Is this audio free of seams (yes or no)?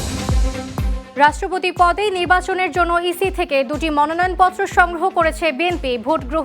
no